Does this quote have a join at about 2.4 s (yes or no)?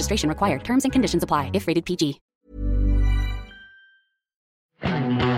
no